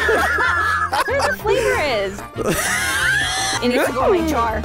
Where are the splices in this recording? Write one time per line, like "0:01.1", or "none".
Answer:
0:03.6